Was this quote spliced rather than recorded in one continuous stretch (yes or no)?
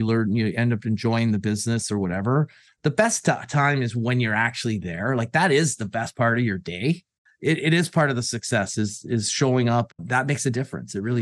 yes